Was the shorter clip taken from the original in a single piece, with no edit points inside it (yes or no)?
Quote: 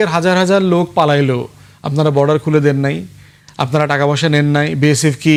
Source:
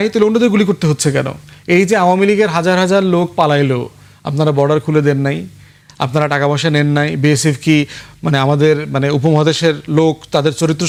yes